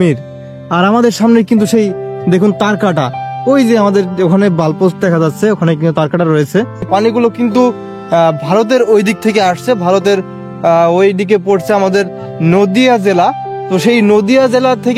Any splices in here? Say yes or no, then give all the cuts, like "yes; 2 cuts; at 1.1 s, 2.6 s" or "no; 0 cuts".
yes; 1 cut; at 6.9 s